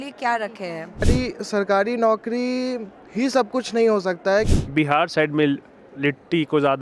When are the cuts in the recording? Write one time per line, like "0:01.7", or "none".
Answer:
0:01.1
0:04.5